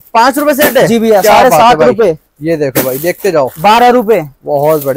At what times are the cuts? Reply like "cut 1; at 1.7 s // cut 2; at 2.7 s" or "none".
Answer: none